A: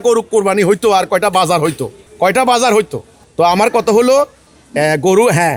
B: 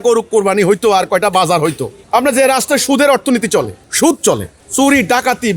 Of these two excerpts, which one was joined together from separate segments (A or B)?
B